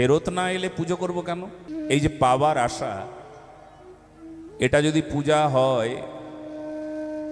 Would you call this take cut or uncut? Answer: cut